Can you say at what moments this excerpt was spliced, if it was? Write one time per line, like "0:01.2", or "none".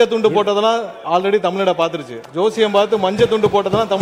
none